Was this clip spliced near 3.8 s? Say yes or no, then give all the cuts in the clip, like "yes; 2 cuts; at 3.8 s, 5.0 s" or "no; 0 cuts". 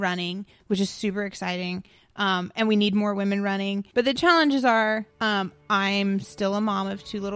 yes; 2 cuts; at 3.8 s, 5.1 s